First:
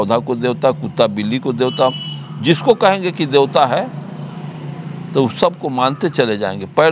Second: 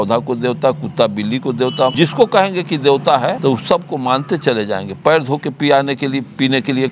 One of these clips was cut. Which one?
second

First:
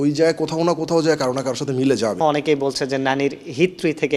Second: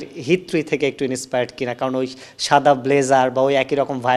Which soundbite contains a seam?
first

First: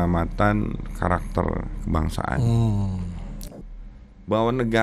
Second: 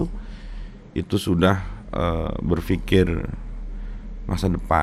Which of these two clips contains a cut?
first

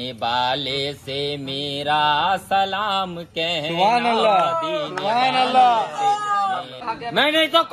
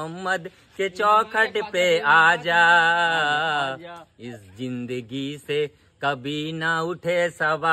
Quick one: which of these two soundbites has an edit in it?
first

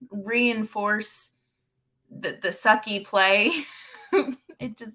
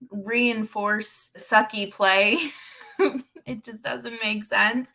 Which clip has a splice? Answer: second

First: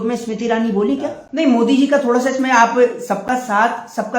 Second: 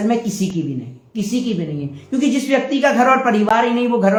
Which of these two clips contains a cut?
first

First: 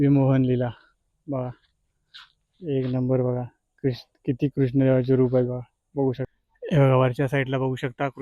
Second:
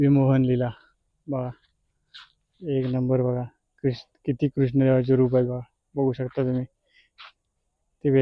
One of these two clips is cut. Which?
first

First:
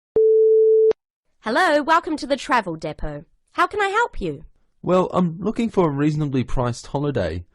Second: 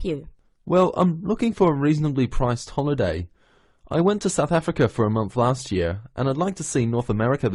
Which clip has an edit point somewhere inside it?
first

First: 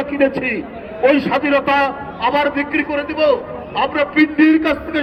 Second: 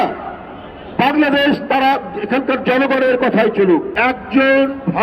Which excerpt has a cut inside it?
second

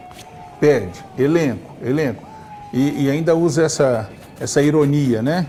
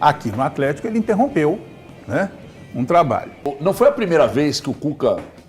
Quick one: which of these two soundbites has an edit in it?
second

